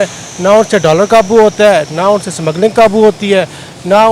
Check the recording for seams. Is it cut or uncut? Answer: uncut